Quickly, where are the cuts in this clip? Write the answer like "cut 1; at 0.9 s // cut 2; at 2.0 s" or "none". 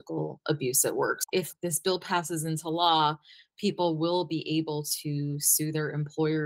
cut 1; at 1.3 s